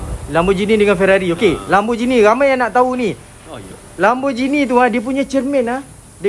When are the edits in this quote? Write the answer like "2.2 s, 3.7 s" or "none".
none

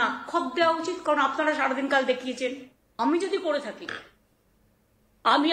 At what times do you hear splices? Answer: 2.8 s

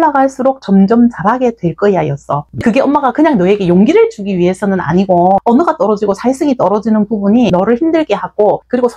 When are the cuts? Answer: 2.4 s

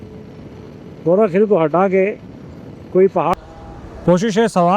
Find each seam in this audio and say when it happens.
3.3 s

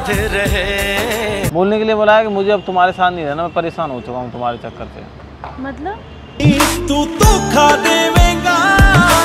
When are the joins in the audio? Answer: 1.5 s

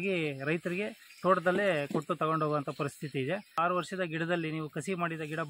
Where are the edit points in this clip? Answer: 3.6 s

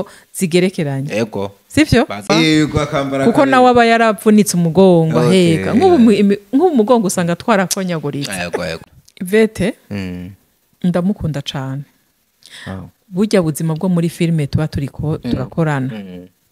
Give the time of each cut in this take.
2.3 s, 8.9 s

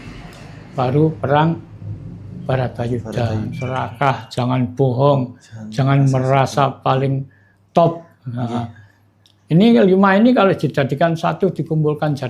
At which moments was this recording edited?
3.6 s

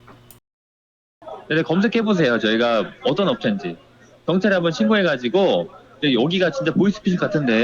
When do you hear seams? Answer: 1.0 s

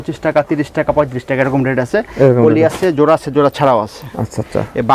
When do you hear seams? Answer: none

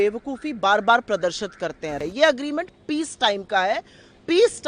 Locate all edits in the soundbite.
2.0 s

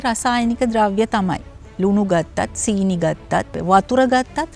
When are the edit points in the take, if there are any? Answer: 3.6 s

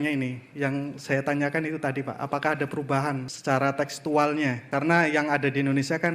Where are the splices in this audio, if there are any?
3.3 s, 4.6 s

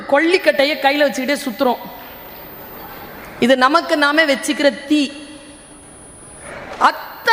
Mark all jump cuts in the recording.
6.4 s

